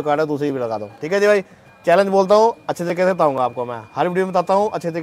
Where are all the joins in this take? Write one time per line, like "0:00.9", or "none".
none